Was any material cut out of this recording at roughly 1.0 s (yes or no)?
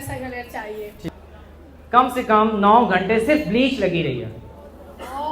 yes